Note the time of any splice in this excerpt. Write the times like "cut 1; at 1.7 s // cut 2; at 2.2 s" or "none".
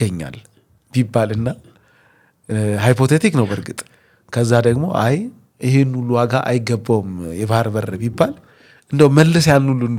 none